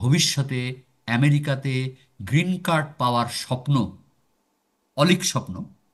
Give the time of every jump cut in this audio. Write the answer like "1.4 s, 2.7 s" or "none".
none

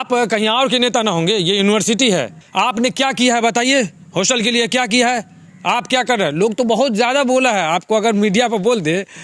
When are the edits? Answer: 2.4 s

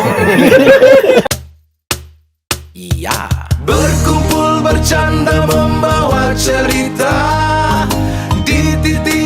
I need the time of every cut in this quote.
1.3 s

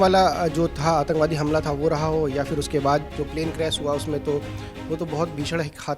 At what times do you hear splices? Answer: 3.1 s

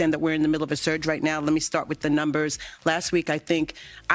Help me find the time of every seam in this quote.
none

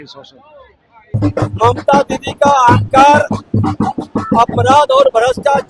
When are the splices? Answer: 1.1 s

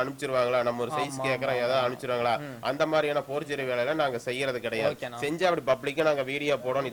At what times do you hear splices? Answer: none

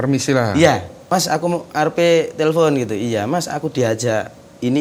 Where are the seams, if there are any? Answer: 0.9 s

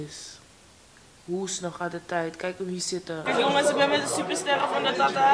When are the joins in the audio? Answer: 3.2 s

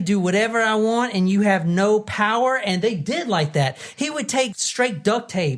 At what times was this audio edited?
4.5 s

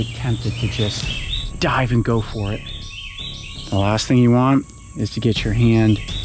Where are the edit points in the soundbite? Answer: 1.4 s, 3.0 s

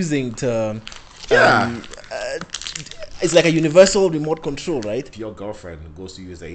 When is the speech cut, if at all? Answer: 5.1 s

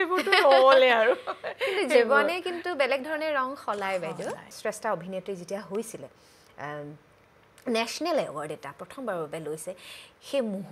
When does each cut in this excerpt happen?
4.5 s

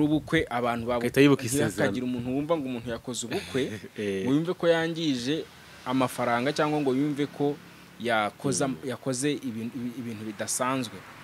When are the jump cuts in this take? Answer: none

